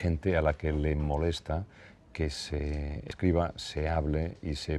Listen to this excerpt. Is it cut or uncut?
cut